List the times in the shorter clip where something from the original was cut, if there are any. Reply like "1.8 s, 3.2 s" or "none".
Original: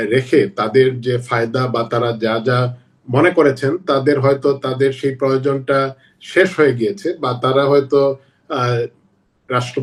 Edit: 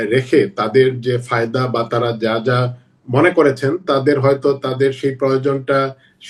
none